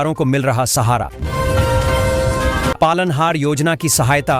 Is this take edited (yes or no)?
yes